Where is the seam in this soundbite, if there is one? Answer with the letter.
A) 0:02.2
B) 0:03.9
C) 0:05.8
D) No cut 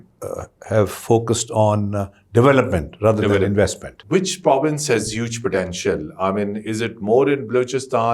B